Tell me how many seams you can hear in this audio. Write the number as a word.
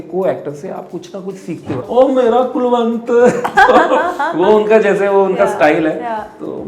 one